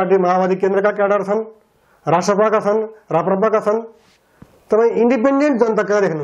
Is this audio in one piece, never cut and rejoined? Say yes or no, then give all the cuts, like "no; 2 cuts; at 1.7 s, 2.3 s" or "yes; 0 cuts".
yes; 0 cuts